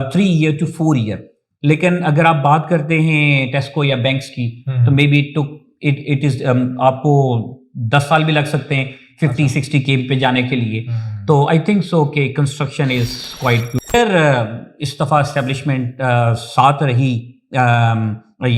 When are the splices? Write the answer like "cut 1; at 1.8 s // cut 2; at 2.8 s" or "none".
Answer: cut 1; at 13.8 s